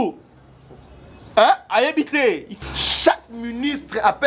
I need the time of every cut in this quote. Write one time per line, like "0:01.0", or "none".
0:02.5